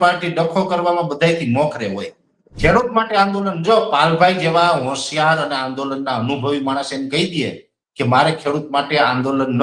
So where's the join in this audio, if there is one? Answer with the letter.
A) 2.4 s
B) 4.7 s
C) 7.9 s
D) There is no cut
A